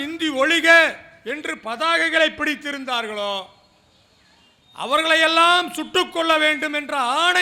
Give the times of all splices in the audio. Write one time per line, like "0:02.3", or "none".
none